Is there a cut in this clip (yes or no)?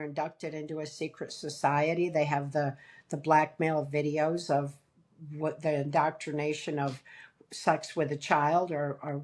no